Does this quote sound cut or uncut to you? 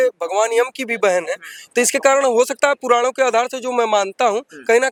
uncut